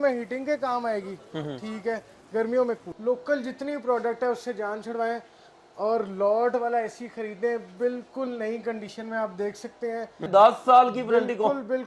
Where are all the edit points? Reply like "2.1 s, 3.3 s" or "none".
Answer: 2.9 s, 10.3 s